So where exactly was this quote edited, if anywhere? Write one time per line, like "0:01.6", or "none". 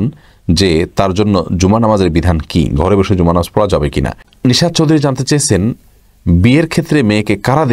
0:04.2